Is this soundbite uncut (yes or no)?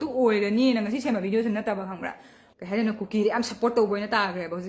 no